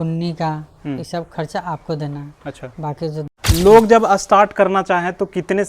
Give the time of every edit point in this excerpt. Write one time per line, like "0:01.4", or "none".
0:02.9

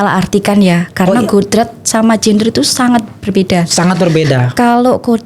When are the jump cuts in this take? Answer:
none

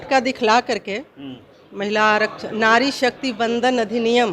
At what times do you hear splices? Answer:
none

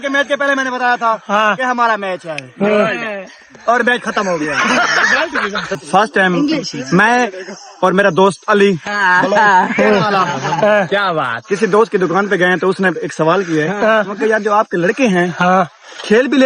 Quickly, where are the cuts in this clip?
0:05.8

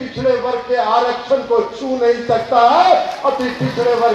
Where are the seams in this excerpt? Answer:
none

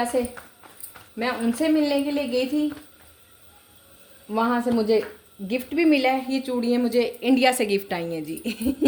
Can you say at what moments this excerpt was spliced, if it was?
none

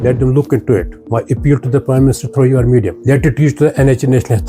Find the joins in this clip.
0:02.9

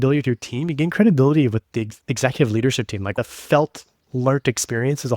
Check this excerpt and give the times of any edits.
0:01.7
0:03.1

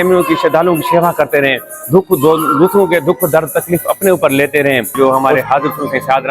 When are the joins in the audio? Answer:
0:04.9

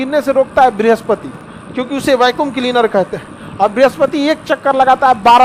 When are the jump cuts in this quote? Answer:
none

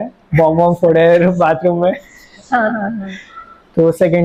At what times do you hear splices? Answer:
none

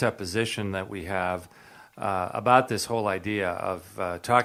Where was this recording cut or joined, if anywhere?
none

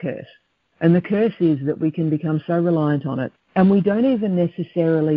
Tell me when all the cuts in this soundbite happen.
0:03.3

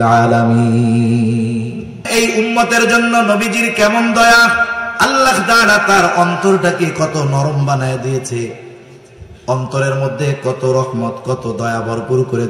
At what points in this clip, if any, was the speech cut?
0:02.1

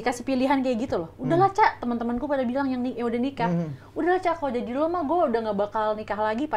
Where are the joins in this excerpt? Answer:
none

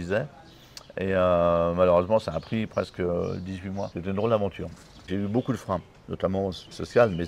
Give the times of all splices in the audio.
0:05.1

